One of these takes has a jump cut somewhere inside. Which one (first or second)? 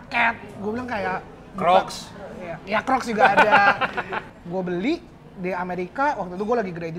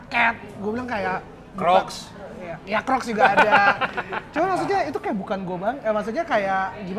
first